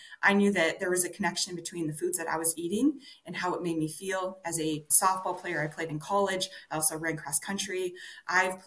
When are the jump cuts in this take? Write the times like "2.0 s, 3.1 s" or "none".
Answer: 4.9 s